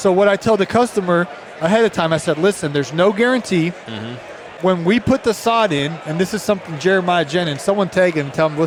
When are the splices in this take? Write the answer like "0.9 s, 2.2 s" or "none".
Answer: none